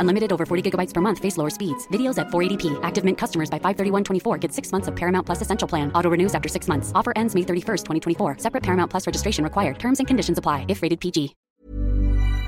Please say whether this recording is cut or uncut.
cut